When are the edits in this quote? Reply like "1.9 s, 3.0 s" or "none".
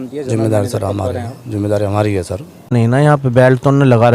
2.7 s